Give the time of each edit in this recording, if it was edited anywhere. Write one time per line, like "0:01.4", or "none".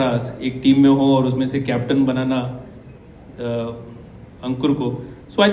none